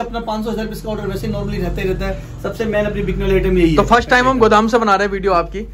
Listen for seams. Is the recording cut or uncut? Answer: uncut